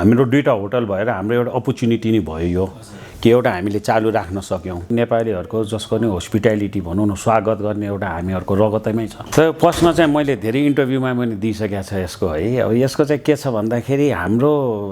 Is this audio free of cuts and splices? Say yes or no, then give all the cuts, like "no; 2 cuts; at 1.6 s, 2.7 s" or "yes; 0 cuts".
no; 2 cuts; at 4.9 s, 9.2 s